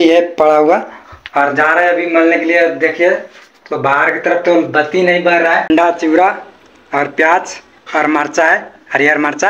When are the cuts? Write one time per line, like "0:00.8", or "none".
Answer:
0:05.7